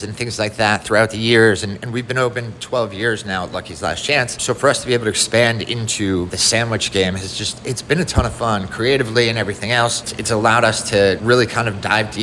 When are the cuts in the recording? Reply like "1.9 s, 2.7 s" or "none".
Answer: 4.4 s, 6.4 s, 10.1 s, 11.2 s